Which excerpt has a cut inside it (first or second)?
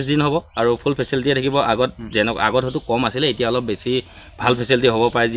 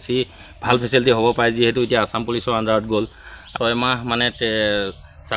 second